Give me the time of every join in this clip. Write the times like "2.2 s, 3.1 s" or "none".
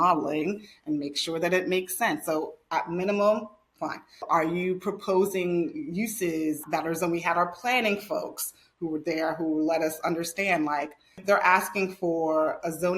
4.2 s, 11.2 s